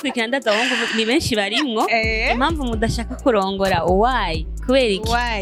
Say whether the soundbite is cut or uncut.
uncut